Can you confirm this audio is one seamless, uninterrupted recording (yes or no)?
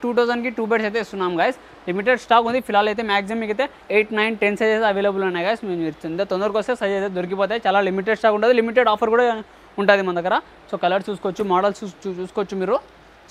yes